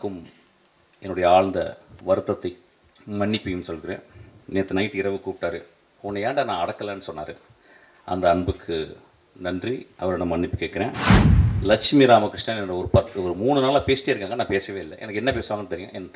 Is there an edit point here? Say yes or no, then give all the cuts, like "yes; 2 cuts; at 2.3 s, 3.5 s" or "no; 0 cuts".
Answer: yes; 2 cuts; at 1.9 s, 4.3 s